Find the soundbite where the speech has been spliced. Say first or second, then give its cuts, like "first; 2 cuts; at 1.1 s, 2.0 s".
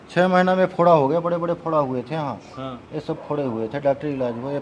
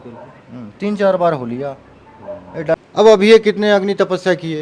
second; 1 cut; at 2.7 s